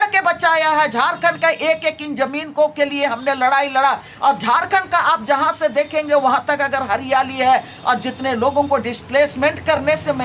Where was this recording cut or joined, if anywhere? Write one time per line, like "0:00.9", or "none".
none